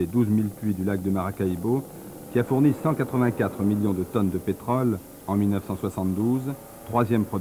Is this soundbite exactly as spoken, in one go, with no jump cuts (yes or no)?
yes